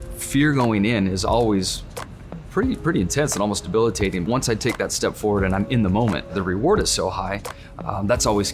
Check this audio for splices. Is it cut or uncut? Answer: cut